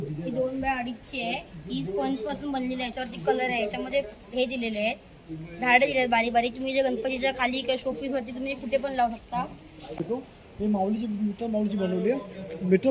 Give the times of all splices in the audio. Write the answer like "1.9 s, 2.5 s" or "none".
10.0 s

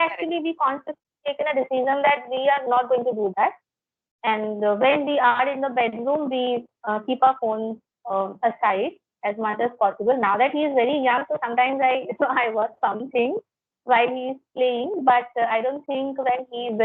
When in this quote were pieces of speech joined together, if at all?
none

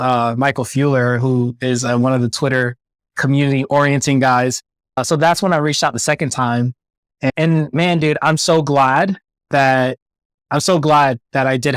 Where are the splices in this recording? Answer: 5.0 s, 7.3 s

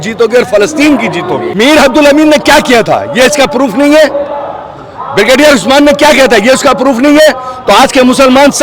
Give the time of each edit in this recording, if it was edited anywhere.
1.5 s

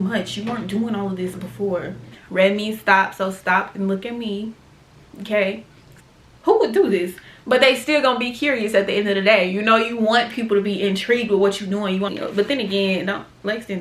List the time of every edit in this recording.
2.2 s, 5.9 s, 12.1 s

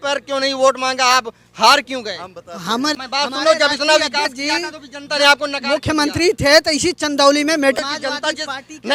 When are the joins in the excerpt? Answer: 3.0 s, 7.8 s

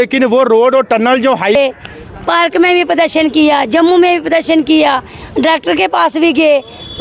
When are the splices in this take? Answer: 1.6 s

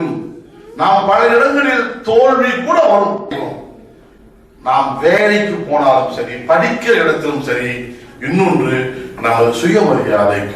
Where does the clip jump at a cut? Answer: 3.3 s

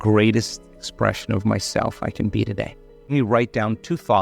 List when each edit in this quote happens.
3.0 s

